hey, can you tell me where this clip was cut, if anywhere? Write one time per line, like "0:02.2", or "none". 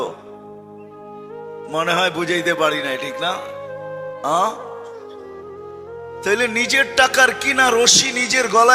0:04.7
0:06.2